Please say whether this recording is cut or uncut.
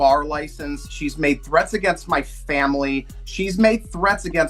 uncut